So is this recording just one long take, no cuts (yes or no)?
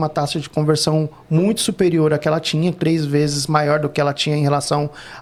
yes